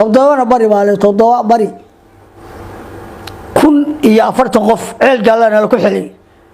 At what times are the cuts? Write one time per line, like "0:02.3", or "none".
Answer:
0:02.4